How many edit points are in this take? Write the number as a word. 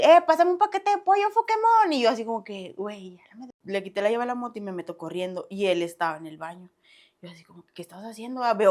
one